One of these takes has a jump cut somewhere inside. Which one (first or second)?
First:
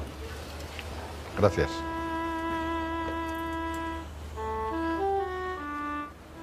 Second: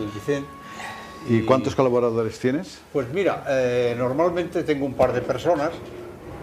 second